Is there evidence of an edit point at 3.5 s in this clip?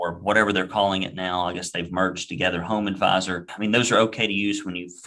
yes; 1 cut; at 3.5 s

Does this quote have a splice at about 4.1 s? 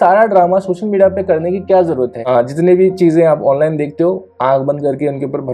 no; 1 cut; at 2.2 s

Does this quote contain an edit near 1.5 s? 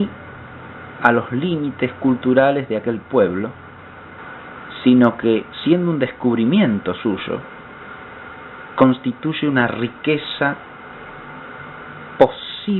no; 0 cuts

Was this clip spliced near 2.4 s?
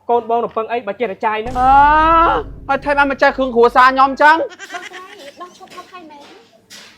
no; 1 cut; at 4.7 s

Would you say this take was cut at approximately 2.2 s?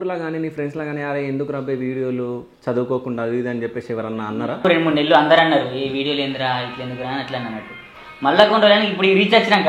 no; 1 cut; at 4.6 s

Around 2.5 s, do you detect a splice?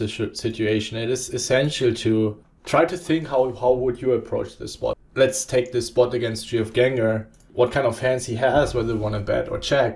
yes; 3 cuts; at 2.5 s, 5.0 s, 7.4 s

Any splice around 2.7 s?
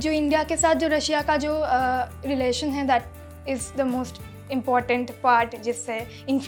no; 0 cuts

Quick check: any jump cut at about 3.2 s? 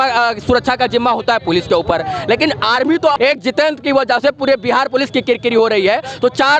yes; 1 cut; at 3.2 s

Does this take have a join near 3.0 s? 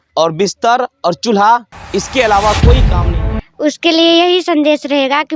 yes; 1 cut; at 3.0 s

